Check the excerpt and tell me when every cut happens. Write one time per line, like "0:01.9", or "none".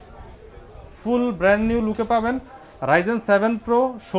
none